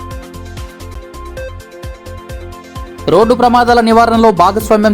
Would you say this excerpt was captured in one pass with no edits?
no; 1 cut; at 0.9 s

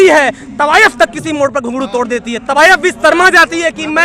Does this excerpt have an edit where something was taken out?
no; 0 cuts

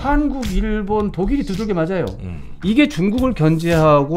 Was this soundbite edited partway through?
yes; 1 cut; at 2.5 s

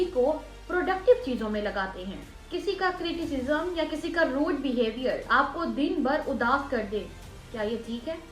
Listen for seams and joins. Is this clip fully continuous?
yes; 0 cuts

